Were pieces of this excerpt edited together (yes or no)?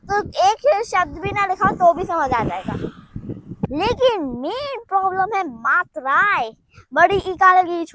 yes